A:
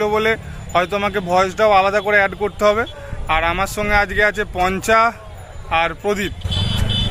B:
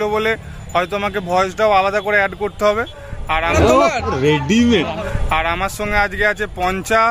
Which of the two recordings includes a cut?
B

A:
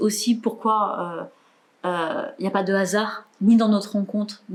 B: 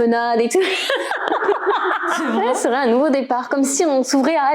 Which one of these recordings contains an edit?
B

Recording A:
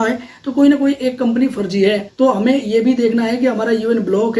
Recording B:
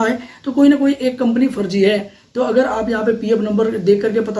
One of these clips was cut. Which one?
A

